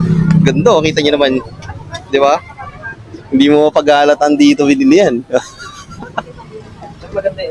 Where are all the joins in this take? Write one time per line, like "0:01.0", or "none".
none